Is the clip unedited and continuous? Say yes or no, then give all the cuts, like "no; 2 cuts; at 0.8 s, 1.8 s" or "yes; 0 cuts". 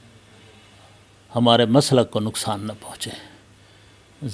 yes; 0 cuts